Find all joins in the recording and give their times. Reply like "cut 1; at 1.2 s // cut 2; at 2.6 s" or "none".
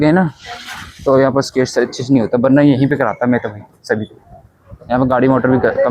none